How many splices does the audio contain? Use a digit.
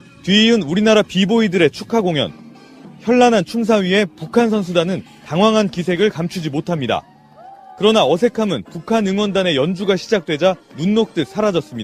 0